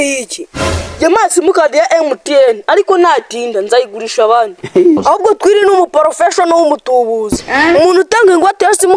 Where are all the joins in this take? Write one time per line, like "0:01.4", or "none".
0:05.0